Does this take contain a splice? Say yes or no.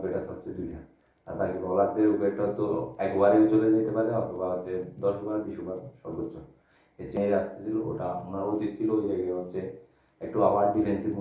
yes